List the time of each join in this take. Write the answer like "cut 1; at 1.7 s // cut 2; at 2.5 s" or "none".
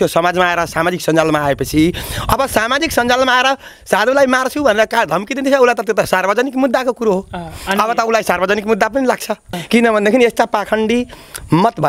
cut 1; at 9.5 s